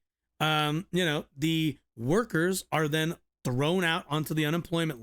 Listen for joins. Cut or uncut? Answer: uncut